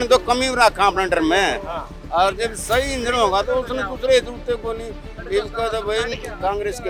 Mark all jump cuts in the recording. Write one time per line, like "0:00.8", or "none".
none